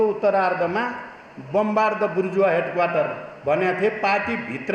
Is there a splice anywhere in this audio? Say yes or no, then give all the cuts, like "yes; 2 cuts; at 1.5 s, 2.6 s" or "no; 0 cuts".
no; 0 cuts